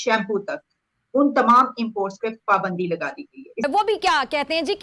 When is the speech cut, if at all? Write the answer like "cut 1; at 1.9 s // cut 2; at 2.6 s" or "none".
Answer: cut 1; at 3.6 s